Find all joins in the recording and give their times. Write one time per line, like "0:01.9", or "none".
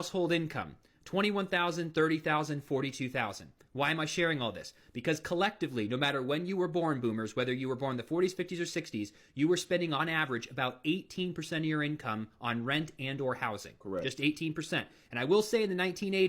0:02.6